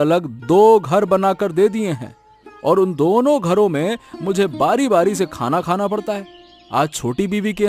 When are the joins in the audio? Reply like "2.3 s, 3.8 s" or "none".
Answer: none